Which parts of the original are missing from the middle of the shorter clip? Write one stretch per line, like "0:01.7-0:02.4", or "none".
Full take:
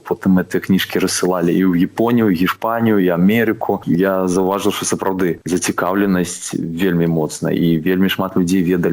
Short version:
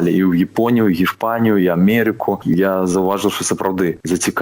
none